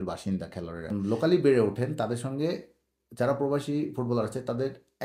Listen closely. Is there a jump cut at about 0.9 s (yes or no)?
yes